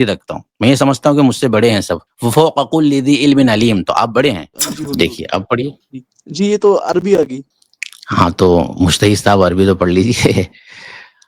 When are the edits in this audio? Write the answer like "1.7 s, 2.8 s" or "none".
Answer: 4.5 s

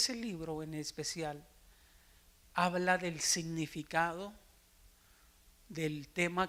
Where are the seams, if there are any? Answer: none

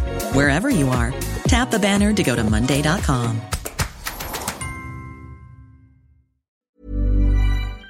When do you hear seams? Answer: 6.6 s

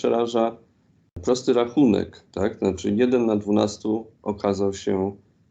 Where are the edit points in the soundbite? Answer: 1.2 s

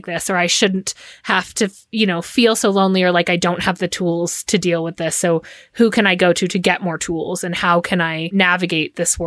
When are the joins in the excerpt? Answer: 8.3 s

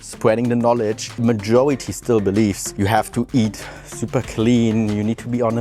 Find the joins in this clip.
1.2 s, 2.7 s

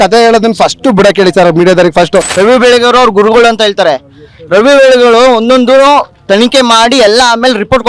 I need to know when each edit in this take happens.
2.3 s

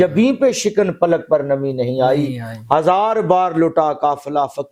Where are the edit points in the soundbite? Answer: none

